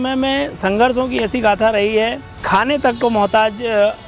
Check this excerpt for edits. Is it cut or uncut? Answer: cut